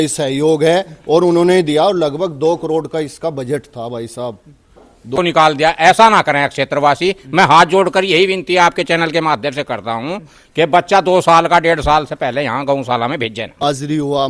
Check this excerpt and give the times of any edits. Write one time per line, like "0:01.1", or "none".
0:05.1
0:13.6